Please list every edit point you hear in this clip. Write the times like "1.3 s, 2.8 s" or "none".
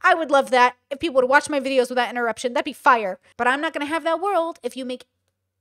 3.2 s

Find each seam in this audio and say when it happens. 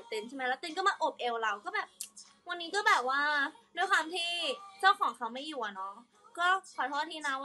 none

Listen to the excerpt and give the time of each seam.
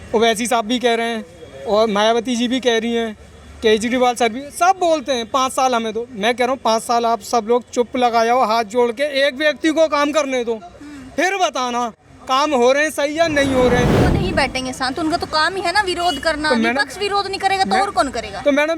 14.1 s

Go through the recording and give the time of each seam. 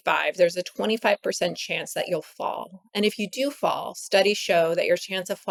none

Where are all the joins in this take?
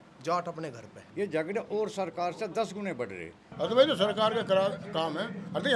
1.0 s, 3.4 s

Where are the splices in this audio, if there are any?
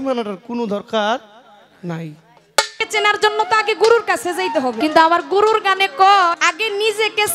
2.8 s, 4.8 s, 6.4 s

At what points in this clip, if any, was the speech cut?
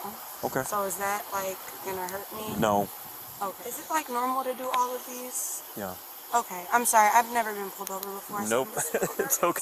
3.7 s

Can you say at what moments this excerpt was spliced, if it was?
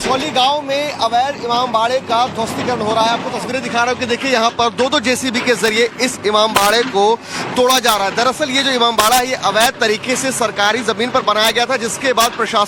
3.1 s

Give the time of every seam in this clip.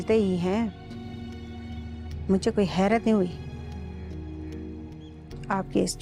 none

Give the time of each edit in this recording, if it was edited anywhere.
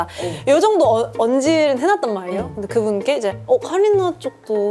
none

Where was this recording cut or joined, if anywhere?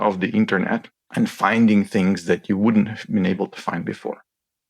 1.0 s

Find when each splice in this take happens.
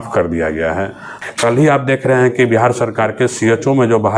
1.1 s

